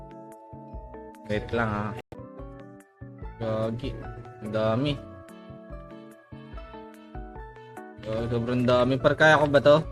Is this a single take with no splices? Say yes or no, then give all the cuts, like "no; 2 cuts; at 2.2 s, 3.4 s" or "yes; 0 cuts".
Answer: no; 1 cut; at 2.2 s